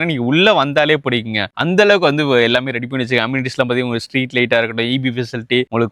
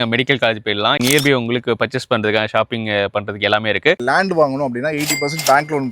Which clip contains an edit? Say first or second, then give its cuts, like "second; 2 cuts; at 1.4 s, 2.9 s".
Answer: second; 2 cuts; at 1.0 s, 4.0 s